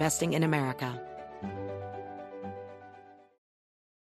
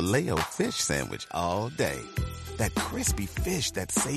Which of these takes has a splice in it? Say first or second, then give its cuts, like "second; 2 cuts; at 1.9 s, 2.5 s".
first; 1 cut; at 0.9 s